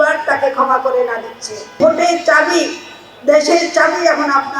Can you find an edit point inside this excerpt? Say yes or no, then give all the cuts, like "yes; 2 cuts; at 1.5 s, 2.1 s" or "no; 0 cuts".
yes; 1 cut; at 1.8 s